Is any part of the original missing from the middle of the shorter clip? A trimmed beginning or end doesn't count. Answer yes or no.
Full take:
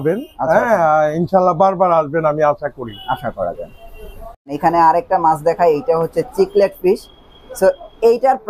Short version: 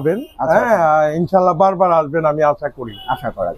no